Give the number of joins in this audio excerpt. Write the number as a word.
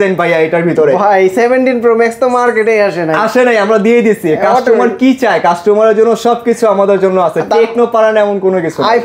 zero